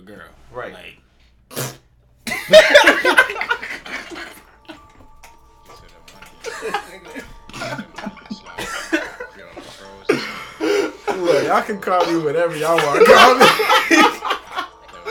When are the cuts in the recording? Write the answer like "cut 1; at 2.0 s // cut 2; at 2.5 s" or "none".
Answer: none

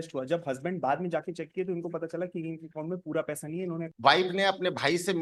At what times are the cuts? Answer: cut 1; at 3.9 s

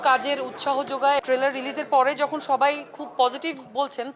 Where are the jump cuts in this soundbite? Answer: cut 1; at 1.2 s

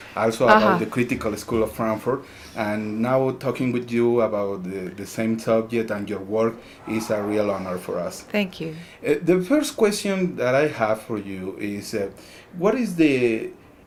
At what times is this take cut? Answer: none

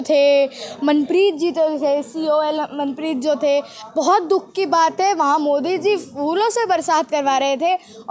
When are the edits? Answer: none

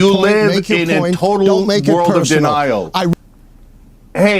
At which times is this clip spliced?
cut 1; at 3.1 s

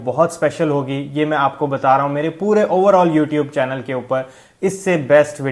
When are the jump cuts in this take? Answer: none

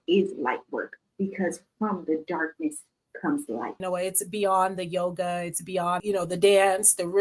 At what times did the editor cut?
cut 1; at 3.8 s // cut 2; at 6.0 s

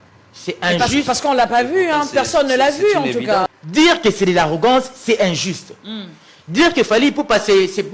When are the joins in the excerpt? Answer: cut 1; at 3.5 s

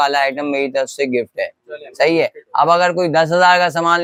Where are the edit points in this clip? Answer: none

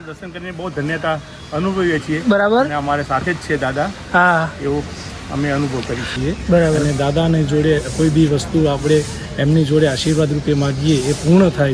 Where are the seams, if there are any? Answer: cut 1; at 6.1 s

